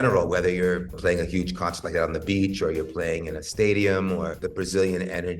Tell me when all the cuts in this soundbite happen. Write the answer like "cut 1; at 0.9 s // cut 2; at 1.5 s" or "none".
cut 1; at 0.9 s // cut 2; at 4.4 s